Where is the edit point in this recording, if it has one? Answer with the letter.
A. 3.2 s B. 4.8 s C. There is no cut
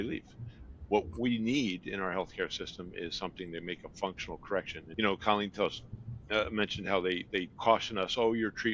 B